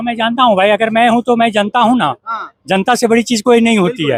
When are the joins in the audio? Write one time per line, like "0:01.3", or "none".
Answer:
none